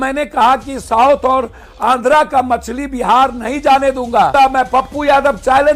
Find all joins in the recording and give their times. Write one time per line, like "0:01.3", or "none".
0:04.3

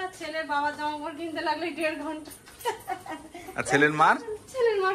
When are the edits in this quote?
none

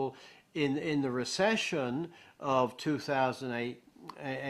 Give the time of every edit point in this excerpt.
0:01.4

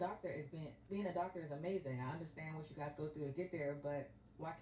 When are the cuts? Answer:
0:01.2

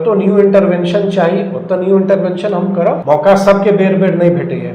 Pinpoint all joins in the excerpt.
0:03.0

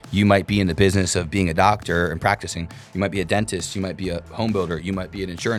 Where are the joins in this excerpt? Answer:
none

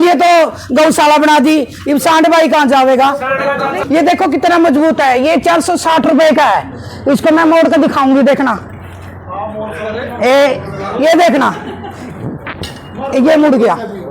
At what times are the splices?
0:03.8

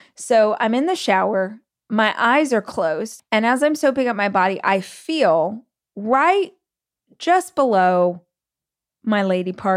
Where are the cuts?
0:01.6
0:03.1

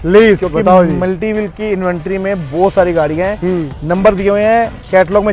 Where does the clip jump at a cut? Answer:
none

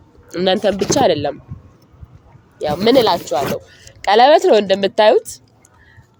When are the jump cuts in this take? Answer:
none

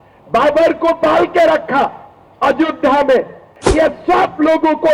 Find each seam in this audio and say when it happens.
0:03.6

